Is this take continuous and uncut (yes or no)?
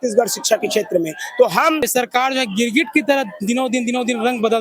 no